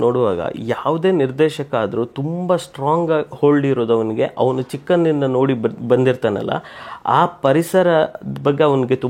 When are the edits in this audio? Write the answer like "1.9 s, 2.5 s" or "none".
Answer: none